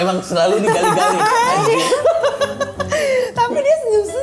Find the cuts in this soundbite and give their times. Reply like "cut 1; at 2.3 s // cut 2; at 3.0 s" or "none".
none